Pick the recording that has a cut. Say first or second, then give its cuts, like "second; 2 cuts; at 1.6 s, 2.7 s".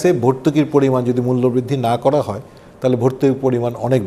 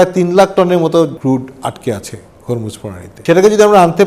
second; 2 cuts; at 1.2 s, 3.1 s